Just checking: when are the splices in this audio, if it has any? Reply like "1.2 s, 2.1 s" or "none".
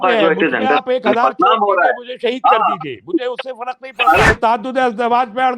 4.4 s